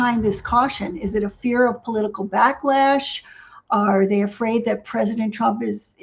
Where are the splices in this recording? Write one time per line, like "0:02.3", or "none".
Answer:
none

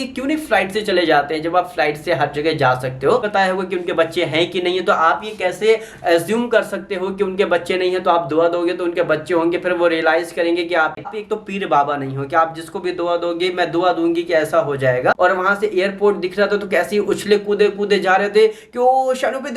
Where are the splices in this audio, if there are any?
0:03.2
0:11.0
0:15.2

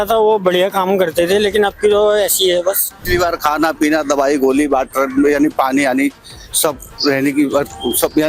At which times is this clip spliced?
0:02.9

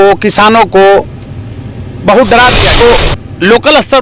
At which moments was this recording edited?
0:02.8

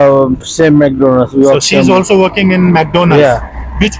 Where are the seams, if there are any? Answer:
none

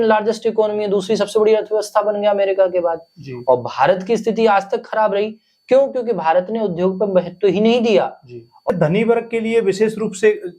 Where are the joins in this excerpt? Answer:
0:08.7

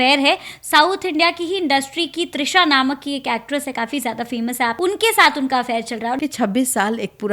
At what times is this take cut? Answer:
0:04.7
0:06.2

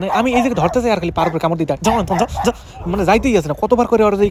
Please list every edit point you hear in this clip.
none

